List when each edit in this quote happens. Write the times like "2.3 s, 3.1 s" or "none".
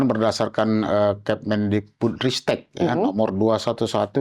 none